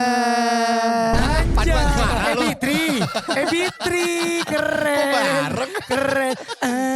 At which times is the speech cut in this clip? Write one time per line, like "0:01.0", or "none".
none